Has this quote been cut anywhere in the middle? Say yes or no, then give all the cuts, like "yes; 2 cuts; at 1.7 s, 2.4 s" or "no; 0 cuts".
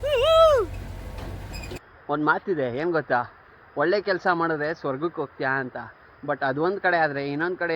yes; 1 cut; at 1.9 s